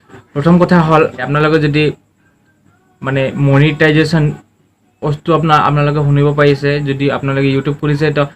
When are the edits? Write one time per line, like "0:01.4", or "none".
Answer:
0:01.3

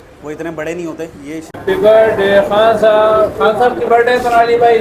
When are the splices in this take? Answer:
0:01.5

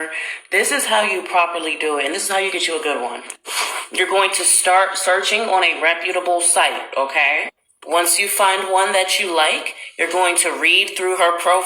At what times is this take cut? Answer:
0:08.9

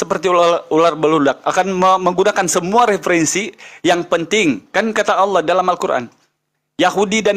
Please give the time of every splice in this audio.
none

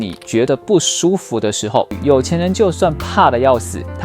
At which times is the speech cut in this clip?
0:02.0

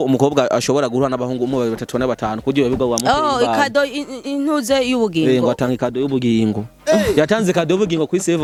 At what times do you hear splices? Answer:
none

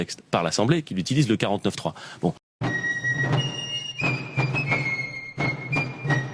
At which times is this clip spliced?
0:02.5

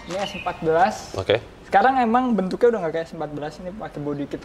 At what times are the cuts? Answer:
none

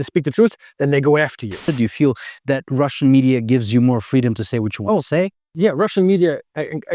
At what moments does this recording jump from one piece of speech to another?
0:01.7

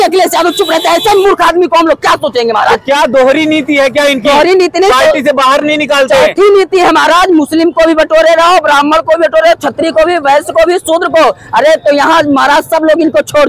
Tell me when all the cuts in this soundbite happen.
none

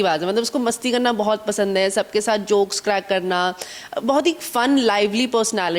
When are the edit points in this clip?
none

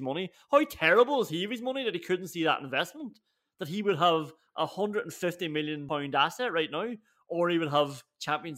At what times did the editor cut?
0:05.8

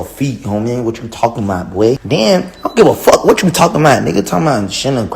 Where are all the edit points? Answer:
0:02.0

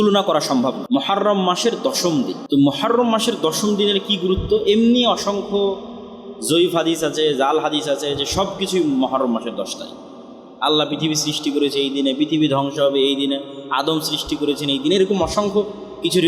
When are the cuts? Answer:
0:00.8
0:02.4

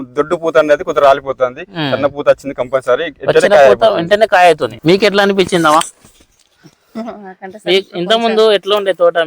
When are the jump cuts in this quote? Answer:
0:04.7

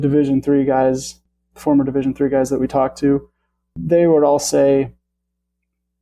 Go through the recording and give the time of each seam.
0:01.2
0:03.7

